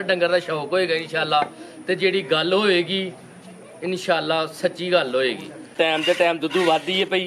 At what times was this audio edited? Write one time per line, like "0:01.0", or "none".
0:05.7